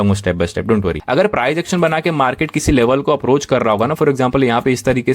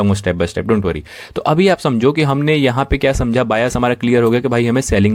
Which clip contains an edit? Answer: first; 1 cut; at 1.0 s

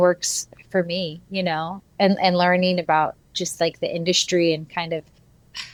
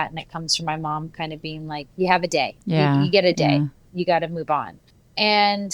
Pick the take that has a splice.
second; 2 cuts; at 2.6 s, 3.8 s

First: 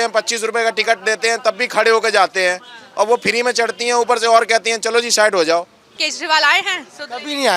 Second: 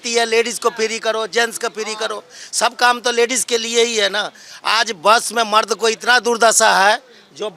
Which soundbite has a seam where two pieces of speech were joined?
first; 1 cut; at 6.0 s

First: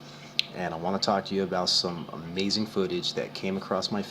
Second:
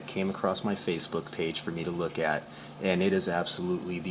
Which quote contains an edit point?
first; 1 cut; at 2.3 s

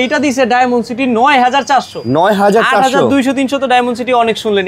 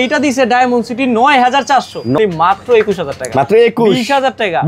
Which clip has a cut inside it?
second; 1 cut; at 2.2 s

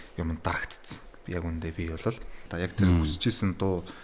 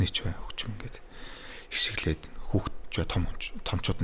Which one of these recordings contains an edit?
first; 1 cut; at 2.4 s

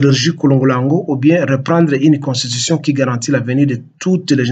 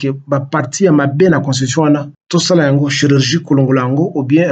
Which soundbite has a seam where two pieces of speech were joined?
second; 1 cut; at 2.1 s

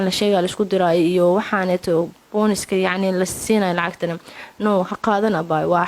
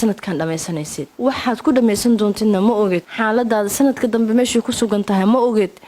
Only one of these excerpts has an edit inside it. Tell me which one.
second; 2 cuts; at 1.0 s, 3.1 s

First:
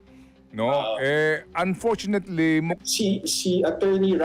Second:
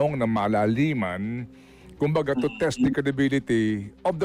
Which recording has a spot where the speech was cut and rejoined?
first; 1 cut; at 2.8 s

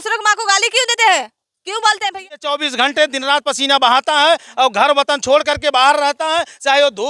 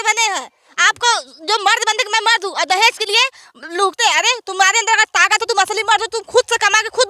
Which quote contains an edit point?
first; 1 cut; at 2.4 s

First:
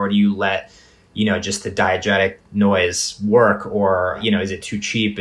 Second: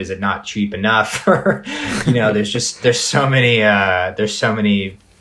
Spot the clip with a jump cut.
first; 1 cut; at 4.2 s

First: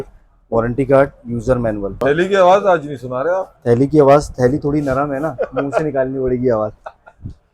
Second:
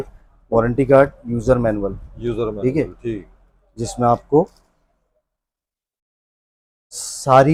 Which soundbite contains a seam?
first; 1 cut; at 2.0 s

